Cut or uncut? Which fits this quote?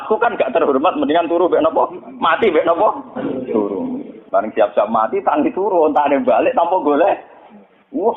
cut